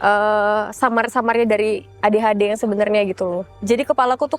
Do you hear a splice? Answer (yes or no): yes